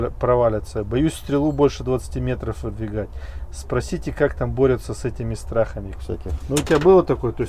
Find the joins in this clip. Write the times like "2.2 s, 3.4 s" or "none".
5.9 s